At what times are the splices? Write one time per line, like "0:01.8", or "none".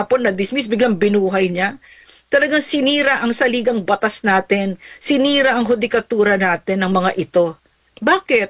none